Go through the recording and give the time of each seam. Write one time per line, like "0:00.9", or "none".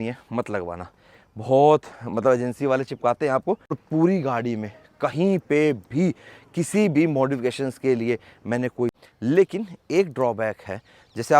0:03.7
0:08.9